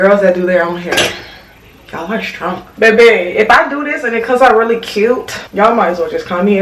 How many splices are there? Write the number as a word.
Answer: one